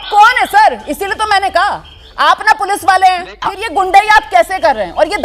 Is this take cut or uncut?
cut